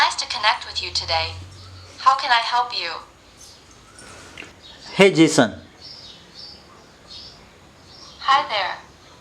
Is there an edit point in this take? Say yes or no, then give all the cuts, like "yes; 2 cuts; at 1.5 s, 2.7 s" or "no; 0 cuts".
yes; 1 cut; at 4.5 s